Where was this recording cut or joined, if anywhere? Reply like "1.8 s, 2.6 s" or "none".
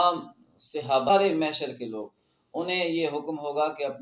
1.1 s